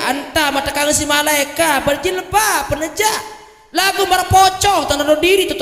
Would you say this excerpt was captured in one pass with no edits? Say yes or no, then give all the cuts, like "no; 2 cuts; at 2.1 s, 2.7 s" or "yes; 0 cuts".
yes; 0 cuts